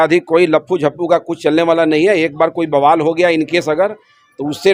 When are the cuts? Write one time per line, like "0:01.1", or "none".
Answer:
none

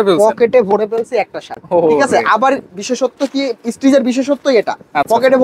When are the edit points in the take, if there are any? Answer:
none

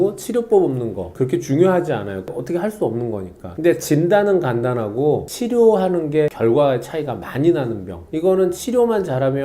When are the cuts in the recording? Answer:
0:01.1

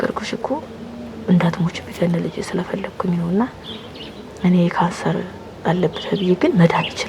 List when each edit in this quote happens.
none

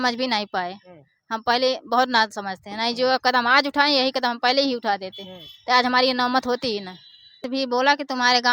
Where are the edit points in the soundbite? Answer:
0:07.4

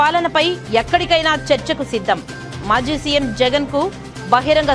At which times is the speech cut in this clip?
none

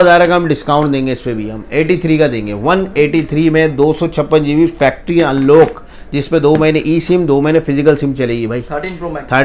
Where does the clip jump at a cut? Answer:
none

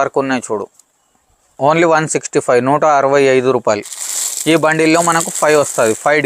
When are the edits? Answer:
none

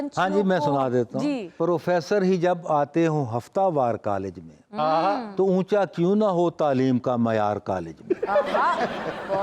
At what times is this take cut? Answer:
0:01.5

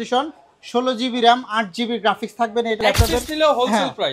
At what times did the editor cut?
0:02.8

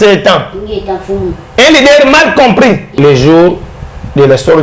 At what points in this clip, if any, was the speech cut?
0:02.9

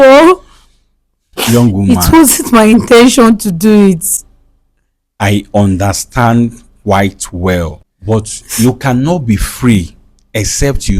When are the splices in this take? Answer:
0:07.8

